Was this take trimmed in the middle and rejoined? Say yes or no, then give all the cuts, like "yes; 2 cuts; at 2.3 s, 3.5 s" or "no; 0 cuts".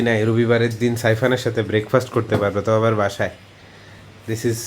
no; 0 cuts